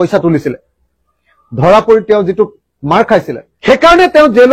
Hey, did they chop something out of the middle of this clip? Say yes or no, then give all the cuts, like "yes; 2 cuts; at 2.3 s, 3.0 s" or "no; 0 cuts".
yes; 1 cut; at 3.4 s